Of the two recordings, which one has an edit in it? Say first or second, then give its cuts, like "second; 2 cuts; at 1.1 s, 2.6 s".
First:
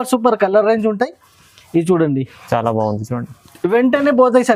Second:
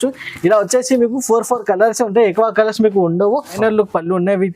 second; 1 cut; at 3.6 s